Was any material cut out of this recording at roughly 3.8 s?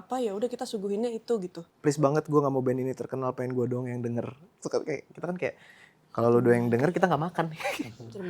no; 1 cut; at 1.6 s

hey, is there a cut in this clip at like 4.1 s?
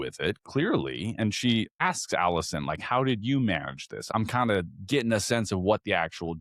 yes; 2 cuts; at 1.8 s, 4.1 s

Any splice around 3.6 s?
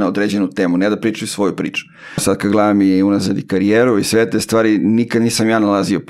no; 1 cut; at 2.2 s

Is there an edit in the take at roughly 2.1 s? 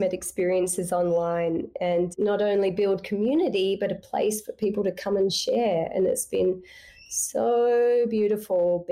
yes; 1 cut; at 2.1 s

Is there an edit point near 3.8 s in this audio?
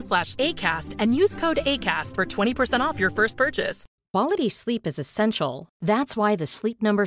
yes; 1 cut; at 3.8 s

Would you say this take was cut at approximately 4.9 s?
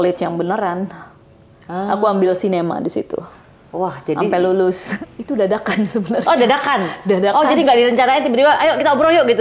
yes; 1 cut; at 4.9 s

